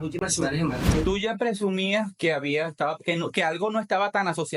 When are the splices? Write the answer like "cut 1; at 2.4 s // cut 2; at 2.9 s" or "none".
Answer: cut 1; at 0.9 s